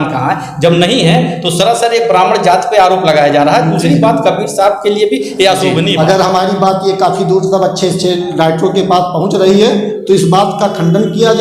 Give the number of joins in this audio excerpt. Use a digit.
1